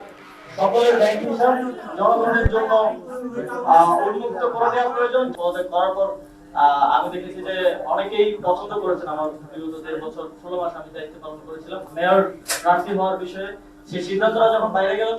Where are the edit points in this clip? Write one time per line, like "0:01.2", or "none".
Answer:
0:05.3
0:11.9